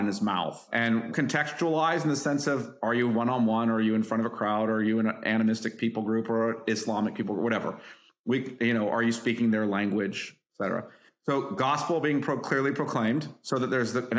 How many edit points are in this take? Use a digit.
1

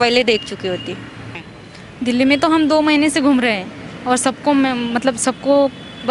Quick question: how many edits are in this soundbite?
1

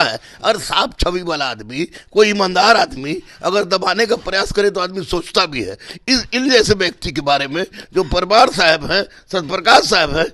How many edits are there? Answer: 0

